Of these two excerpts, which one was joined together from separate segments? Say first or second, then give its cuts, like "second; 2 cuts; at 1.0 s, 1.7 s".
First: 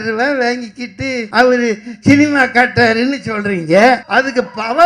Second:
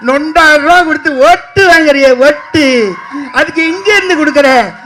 first; 2 cuts; at 1.2 s, 4.0 s